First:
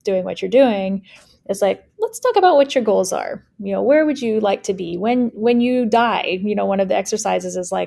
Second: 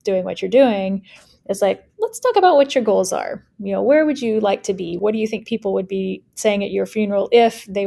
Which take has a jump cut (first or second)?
second